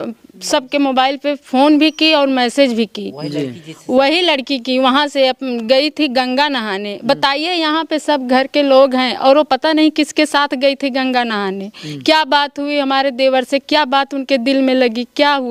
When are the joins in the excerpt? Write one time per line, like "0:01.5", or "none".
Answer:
none